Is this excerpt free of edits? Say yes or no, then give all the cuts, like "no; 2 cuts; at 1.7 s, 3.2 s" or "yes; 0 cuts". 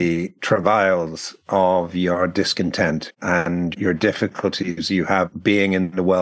no; 1 cut; at 5.3 s